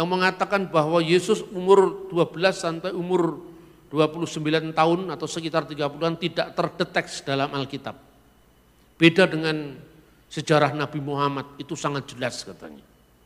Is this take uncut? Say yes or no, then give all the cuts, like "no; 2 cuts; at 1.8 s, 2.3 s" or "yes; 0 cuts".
yes; 0 cuts